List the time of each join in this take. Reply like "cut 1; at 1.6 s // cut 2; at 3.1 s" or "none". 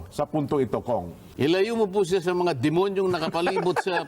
cut 1; at 1.3 s